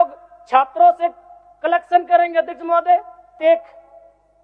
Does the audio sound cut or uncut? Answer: cut